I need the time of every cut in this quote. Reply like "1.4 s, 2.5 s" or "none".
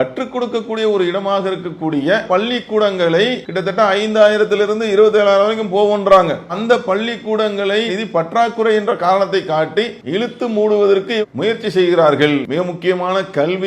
3.5 s, 10.0 s